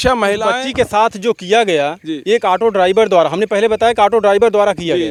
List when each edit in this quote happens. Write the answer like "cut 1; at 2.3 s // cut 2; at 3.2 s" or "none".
none